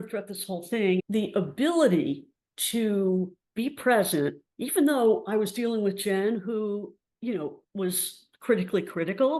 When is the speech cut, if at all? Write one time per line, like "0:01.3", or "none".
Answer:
0:01.0